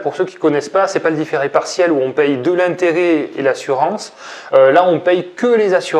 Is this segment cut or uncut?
uncut